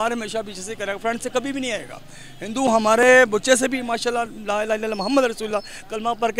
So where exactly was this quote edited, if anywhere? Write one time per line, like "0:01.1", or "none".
none